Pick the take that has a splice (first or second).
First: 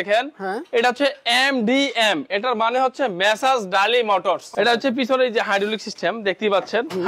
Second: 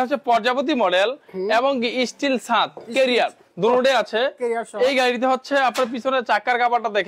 first